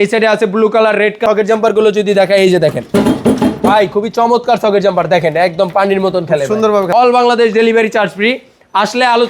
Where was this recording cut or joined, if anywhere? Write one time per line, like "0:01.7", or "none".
0:01.2
0:06.9